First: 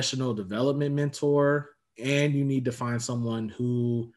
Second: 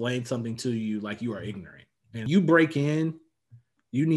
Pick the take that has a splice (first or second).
second